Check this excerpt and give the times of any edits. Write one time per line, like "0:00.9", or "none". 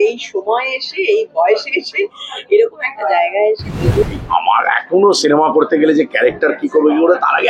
0:04.0